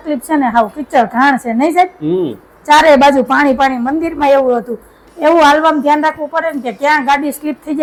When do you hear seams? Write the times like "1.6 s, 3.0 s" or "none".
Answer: none